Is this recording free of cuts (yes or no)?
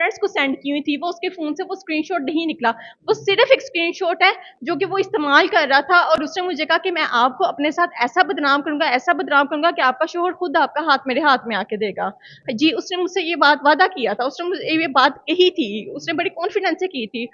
yes